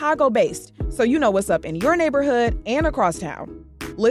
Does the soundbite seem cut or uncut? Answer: uncut